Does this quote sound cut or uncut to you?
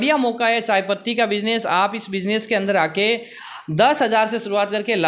uncut